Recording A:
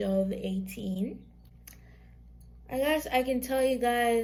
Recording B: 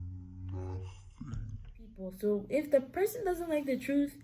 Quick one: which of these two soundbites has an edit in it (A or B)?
B